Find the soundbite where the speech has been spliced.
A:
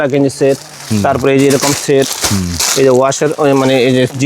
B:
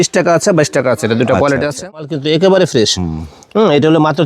B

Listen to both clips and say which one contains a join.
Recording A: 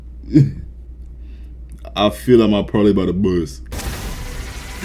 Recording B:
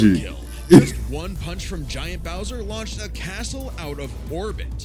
A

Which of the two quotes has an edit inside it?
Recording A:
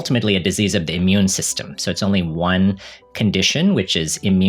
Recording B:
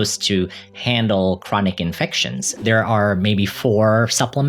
B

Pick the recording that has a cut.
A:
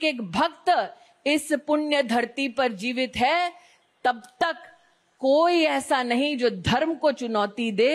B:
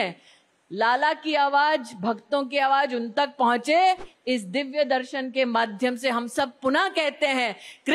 B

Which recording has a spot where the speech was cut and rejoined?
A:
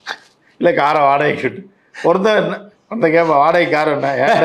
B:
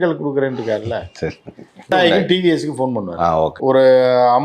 B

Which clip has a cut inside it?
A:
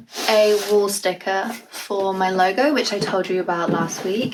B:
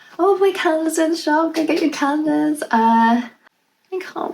B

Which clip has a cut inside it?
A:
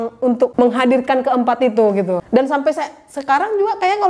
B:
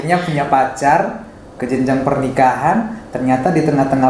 A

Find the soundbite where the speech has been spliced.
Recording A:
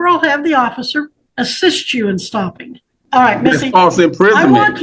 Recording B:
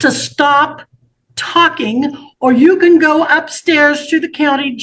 A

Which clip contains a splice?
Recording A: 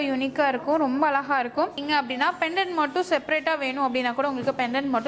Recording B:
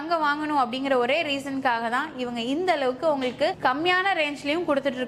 A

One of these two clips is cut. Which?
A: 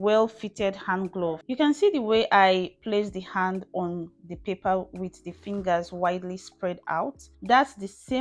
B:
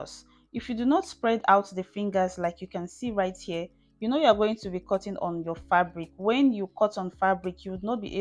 A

